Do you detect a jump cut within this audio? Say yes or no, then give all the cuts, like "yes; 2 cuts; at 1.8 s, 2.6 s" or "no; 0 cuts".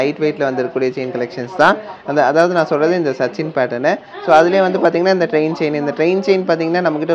no; 0 cuts